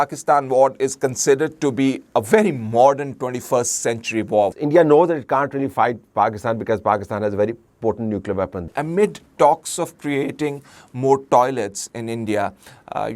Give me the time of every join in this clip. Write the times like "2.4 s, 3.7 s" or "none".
4.5 s, 8.6 s